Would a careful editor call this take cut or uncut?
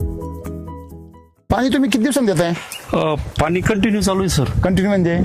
cut